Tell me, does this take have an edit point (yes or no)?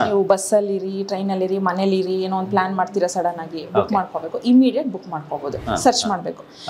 yes